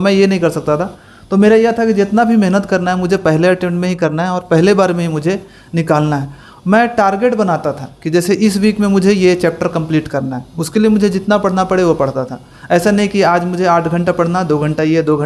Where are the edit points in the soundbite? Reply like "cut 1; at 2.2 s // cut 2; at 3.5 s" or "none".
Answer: none